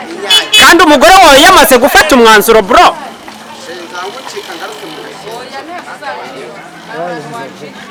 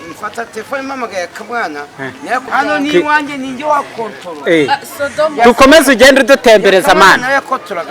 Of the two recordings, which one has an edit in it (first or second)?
second